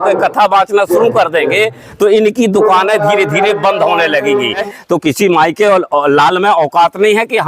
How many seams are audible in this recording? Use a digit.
1